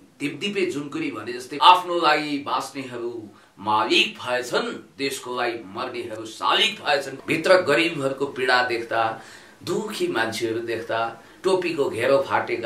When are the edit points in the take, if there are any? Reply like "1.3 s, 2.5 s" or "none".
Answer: 1.5 s, 7.1 s